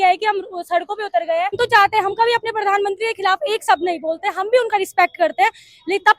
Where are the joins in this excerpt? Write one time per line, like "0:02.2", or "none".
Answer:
0:01.6